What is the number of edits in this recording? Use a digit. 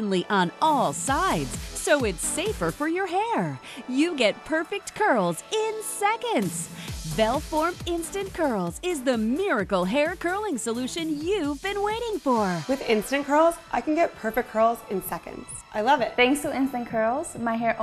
2